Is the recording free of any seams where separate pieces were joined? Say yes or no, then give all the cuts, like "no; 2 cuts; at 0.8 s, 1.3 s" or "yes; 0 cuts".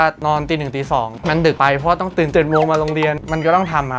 no; 2 cuts; at 1.4 s, 3.2 s